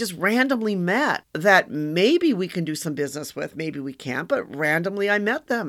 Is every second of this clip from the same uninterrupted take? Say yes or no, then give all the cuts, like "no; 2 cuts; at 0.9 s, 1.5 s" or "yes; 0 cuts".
no; 1 cut; at 1.3 s